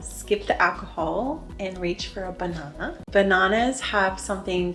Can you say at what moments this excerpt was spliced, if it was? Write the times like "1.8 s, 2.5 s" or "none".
3.0 s